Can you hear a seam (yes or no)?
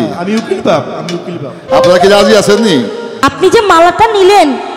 yes